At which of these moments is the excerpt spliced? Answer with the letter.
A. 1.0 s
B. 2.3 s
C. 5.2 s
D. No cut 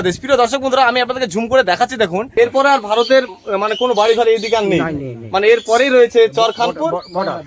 B